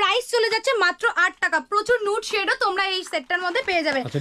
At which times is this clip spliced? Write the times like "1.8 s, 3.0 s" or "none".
none

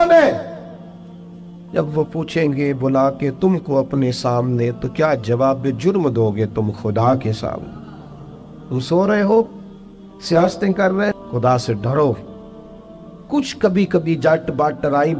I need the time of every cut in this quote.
11.2 s

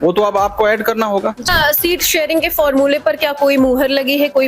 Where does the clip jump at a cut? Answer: 1.5 s

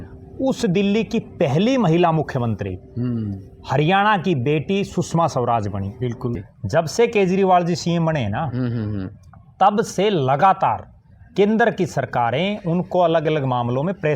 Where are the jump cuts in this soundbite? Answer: 6.4 s

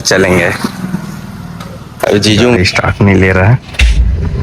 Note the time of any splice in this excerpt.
2.6 s

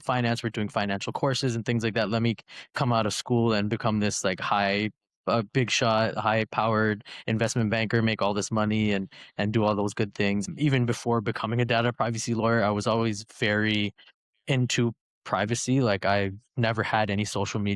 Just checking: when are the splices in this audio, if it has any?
10.5 s

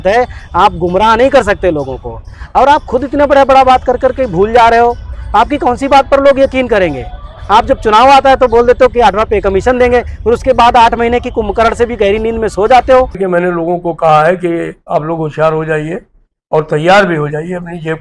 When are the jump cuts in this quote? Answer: 13.2 s

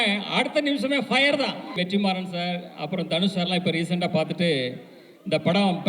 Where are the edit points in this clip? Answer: 1.8 s

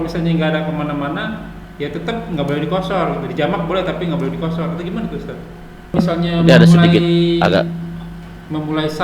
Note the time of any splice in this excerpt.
5.9 s

